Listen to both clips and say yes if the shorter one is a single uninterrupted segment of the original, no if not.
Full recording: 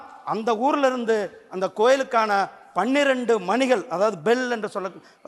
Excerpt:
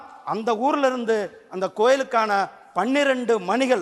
yes